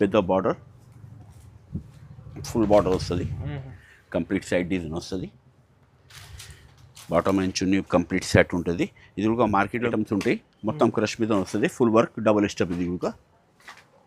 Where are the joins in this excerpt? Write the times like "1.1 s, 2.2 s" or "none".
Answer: 9.9 s